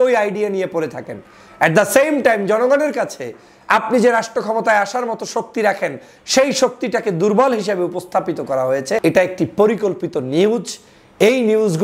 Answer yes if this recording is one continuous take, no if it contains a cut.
no